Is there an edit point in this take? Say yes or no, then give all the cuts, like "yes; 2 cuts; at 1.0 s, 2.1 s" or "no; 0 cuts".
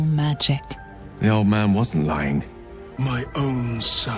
yes; 1 cut; at 2.9 s